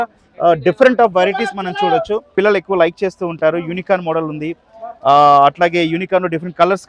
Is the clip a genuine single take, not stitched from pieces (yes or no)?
no